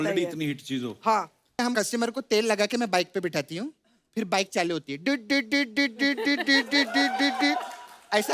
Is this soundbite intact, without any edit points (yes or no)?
no